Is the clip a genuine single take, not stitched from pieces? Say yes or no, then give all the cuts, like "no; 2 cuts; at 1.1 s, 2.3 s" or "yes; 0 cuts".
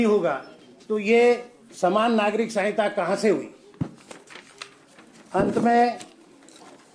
yes; 0 cuts